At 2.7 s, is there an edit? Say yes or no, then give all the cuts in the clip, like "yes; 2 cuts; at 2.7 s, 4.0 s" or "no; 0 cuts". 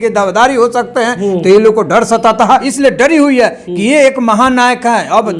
yes; 1 cut; at 2.7 s